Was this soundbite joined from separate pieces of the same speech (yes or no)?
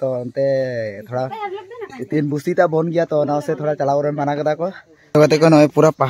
yes